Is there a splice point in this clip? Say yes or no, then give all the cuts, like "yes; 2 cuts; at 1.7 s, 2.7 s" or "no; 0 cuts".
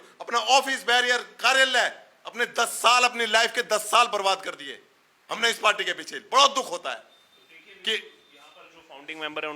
no; 0 cuts